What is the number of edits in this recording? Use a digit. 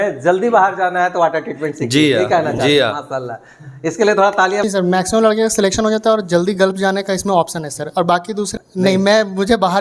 2